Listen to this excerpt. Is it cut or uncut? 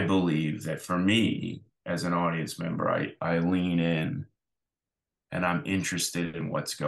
uncut